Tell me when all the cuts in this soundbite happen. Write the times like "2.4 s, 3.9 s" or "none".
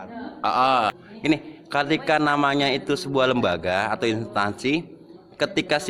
1.0 s